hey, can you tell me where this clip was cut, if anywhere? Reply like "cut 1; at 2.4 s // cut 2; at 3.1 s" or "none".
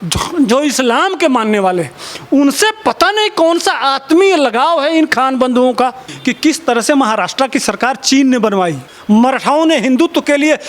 cut 1; at 6.1 s // cut 2; at 8.9 s